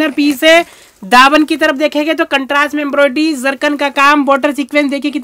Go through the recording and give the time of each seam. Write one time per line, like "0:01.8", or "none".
none